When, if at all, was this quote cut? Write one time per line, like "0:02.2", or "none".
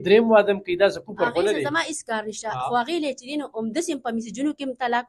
none